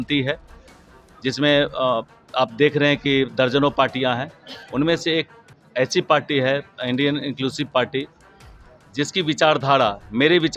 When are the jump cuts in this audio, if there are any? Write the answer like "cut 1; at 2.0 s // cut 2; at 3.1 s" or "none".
none